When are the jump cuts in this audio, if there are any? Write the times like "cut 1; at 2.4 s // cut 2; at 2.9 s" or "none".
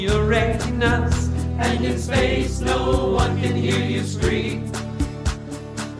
cut 1; at 1.4 s